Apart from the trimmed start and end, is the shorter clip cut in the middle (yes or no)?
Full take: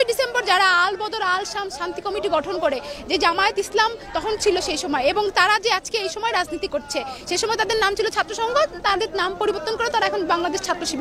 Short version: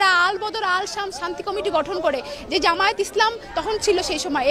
no